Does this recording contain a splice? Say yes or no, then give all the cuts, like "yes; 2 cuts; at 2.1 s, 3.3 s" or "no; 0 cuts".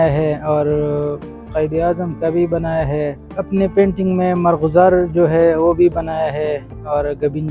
yes; 1 cut; at 3.2 s